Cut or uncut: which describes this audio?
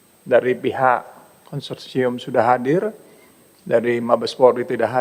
uncut